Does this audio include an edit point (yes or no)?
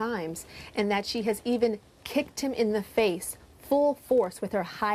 yes